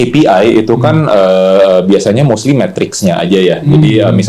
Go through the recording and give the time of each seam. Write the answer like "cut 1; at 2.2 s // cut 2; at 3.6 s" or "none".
none